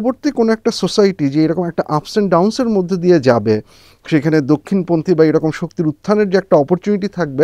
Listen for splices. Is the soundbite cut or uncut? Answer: uncut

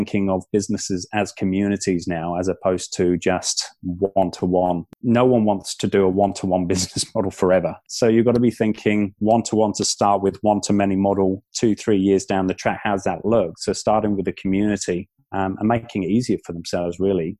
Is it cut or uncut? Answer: cut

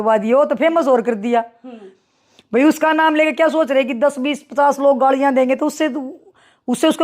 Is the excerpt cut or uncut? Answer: uncut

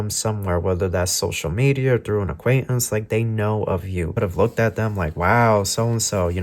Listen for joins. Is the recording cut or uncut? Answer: cut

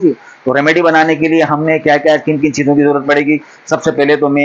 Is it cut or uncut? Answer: uncut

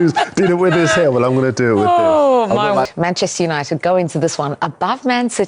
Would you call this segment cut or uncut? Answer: cut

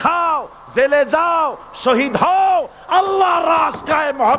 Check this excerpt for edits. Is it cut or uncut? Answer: uncut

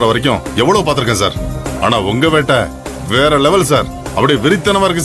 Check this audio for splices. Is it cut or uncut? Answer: uncut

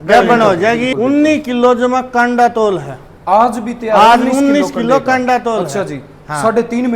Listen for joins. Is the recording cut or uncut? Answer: cut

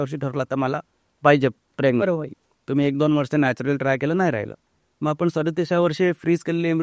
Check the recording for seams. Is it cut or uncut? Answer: uncut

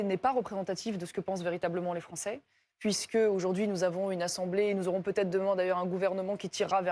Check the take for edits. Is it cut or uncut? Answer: uncut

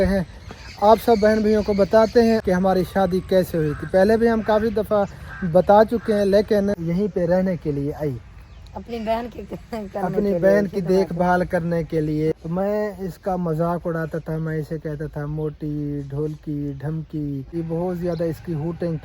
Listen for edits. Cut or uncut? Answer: cut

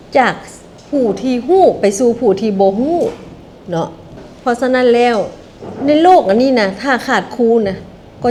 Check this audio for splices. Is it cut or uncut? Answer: uncut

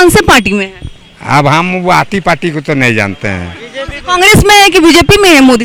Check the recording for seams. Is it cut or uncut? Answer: uncut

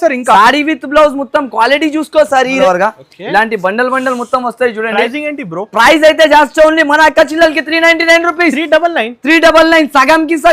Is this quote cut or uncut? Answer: cut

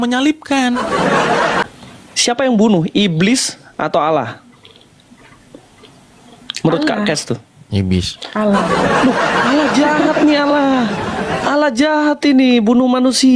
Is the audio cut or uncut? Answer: cut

